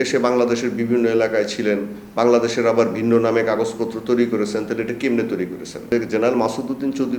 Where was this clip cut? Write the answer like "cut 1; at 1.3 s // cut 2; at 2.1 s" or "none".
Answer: cut 1; at 5.9 s